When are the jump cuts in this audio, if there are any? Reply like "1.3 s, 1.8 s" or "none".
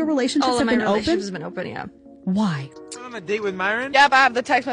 3.1 s